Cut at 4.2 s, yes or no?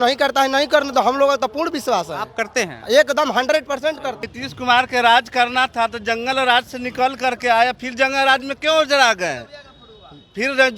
yes